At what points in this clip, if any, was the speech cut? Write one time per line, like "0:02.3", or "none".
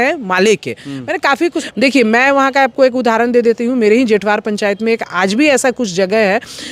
0:01.6